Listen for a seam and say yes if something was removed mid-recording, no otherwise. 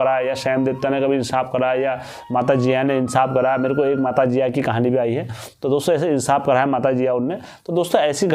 no